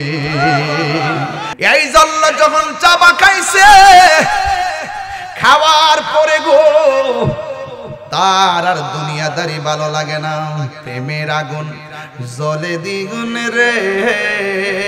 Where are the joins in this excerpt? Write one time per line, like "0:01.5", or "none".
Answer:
0:01.4